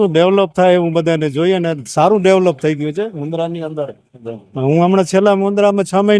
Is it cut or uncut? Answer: uncut